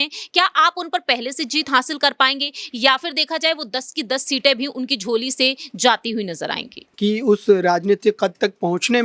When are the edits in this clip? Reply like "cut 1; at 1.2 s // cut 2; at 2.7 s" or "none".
cut 1; at 6.8 s